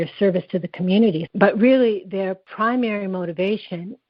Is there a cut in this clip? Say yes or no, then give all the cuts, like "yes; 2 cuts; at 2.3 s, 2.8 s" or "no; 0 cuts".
yes; 2 cuts; at 1.2 s, 2.4 s